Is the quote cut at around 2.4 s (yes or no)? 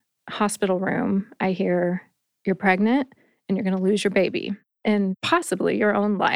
no